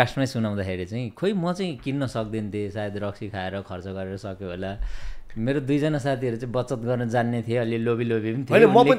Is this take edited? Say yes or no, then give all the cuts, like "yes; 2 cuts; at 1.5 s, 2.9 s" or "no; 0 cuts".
no; 0 cuts